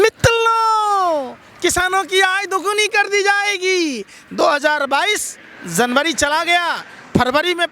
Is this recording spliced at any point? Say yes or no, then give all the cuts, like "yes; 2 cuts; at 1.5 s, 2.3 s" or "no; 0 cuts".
no; 0 cuts